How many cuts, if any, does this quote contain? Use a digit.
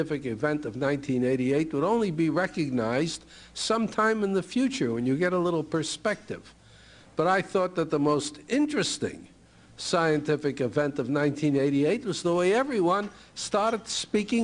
1